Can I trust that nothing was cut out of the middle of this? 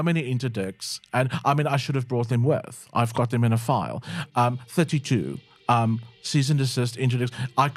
yes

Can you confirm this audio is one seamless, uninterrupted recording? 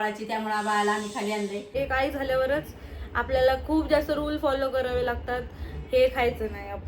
no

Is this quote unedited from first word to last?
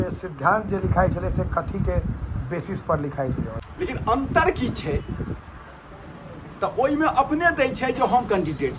no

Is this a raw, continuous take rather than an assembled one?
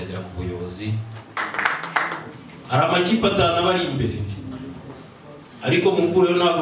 no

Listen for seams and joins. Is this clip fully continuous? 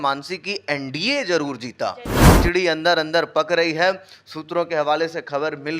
no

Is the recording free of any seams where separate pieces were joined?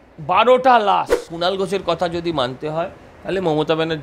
no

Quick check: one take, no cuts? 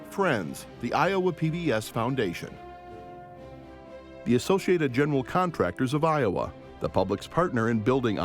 no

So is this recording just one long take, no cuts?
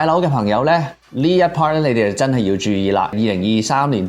no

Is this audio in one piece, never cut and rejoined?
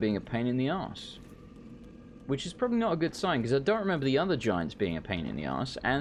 yes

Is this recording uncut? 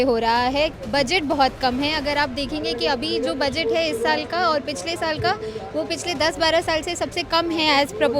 yes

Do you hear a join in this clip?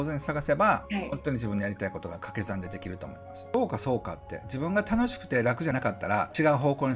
yes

